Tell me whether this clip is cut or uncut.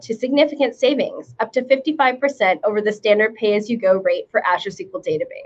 uncut